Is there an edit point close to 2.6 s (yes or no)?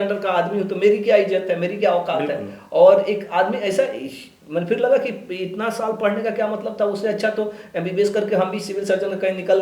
no